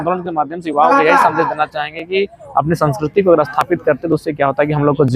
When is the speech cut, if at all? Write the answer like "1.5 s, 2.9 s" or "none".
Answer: none